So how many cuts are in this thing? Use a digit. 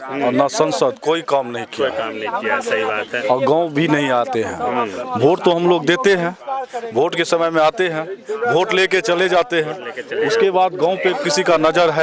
0